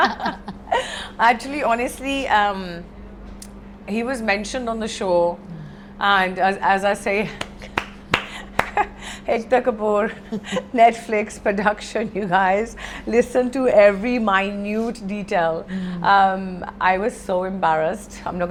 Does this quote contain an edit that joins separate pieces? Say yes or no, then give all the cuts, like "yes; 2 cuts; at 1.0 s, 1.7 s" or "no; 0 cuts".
no; 0 cuts